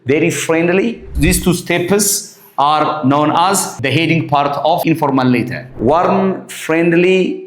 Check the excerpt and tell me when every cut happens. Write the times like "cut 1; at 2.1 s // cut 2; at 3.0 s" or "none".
cut 1; at 1.1 s // cut 2; at 3.7 s // cut 3; at 4.8 s // cut 4; at 5.6 s